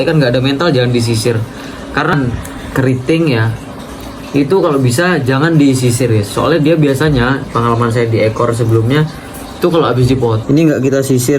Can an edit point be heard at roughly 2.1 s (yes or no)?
yes